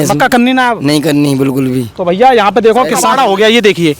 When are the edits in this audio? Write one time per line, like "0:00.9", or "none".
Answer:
0:03.1